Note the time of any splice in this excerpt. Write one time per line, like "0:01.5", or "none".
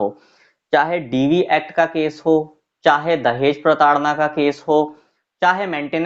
none

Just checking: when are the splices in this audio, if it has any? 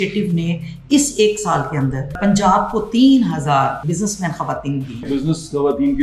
0:02.2
0:03.8
0:05.1

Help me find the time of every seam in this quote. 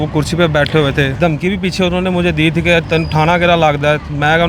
0:01.2

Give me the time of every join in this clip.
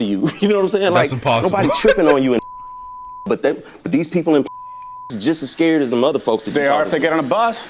none

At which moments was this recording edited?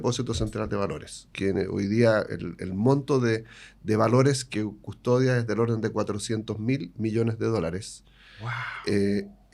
0:01.3

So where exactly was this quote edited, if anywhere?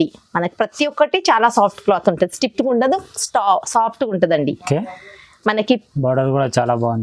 none

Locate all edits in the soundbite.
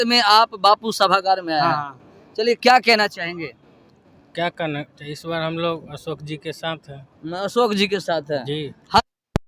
none

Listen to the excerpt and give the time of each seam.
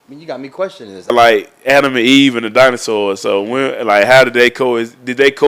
0:01.1

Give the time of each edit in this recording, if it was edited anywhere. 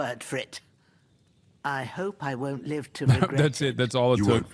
none

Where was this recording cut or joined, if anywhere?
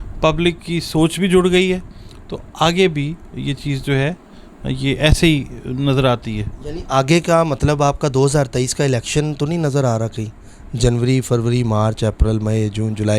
none

